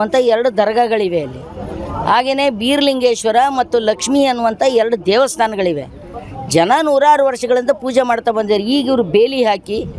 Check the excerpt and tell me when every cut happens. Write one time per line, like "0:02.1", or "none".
none